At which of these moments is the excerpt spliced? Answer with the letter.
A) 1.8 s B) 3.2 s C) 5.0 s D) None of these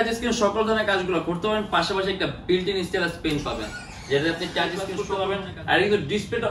C